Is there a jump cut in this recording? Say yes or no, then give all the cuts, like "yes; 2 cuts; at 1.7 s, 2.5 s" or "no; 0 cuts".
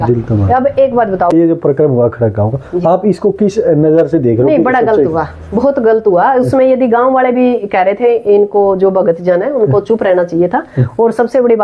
yes; 1 cut; at 1.3 s